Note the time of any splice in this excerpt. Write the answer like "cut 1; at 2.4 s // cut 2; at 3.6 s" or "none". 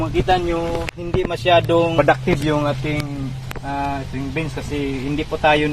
cut 1; at 1.9 s